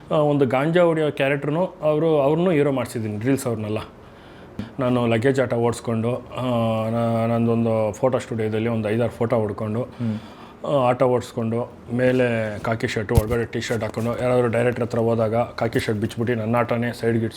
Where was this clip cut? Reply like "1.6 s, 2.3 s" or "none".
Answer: 4.7 s